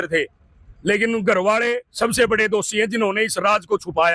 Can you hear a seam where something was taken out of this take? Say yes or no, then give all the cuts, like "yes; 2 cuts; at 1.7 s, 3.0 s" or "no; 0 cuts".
no; 0 cuts